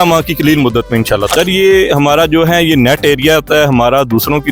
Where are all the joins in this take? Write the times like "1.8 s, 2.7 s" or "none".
1.3 s